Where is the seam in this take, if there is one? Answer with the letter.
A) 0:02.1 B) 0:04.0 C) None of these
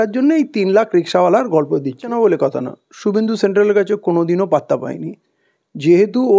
A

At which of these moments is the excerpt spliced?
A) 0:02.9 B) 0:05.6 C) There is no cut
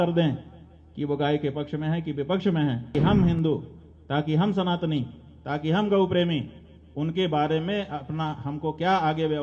A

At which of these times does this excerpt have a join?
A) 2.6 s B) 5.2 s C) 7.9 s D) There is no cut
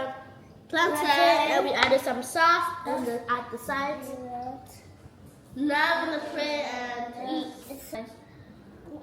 C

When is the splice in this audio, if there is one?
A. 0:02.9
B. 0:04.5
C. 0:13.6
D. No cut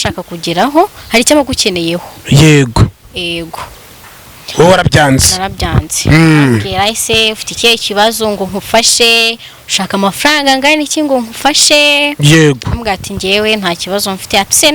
D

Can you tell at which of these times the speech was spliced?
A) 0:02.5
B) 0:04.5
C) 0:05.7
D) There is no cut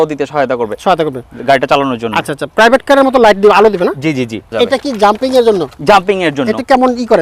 B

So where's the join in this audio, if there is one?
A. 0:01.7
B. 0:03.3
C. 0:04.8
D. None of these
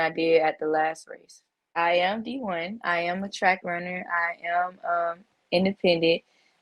A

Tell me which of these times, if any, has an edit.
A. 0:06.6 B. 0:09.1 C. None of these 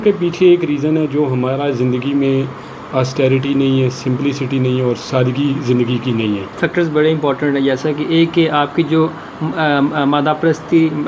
A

